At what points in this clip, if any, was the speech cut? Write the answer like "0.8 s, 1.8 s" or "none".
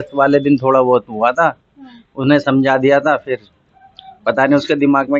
none